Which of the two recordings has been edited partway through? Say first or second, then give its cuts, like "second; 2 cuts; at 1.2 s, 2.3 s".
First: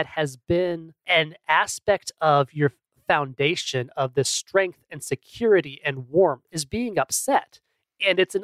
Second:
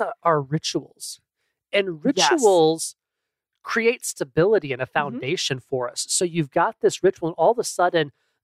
first; 2 cuts; at 0.9 s, 6.6 s